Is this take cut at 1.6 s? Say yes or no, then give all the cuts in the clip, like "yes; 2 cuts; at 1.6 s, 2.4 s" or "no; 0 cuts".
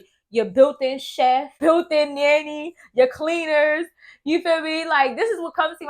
yes; 1 cut; at 1.6 s